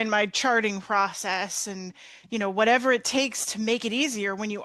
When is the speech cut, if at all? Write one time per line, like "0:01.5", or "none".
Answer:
none